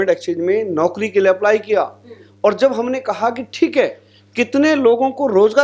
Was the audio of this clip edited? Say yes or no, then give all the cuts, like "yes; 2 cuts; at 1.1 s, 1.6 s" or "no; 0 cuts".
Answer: no; 0 cuts